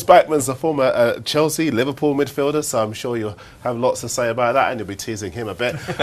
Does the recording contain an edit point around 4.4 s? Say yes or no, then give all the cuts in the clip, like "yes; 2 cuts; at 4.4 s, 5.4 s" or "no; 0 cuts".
yes; 1 cut; at 4.4 s